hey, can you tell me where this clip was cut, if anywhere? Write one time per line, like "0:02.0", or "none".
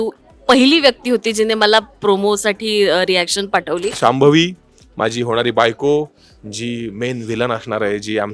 0:03.9